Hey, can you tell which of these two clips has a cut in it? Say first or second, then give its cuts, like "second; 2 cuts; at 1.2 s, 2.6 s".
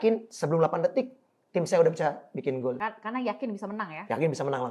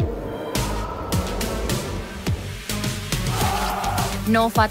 first; 1 cut; at 2.8 s